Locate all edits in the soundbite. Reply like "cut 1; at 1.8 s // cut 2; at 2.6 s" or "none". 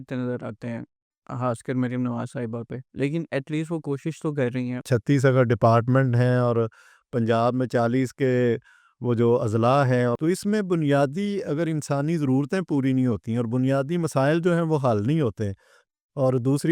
cut 1; at 4.8 s // cut 2; at 10.2 s